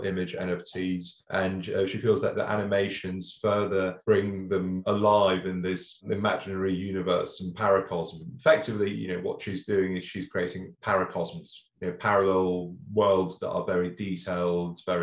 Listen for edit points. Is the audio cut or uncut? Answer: uncut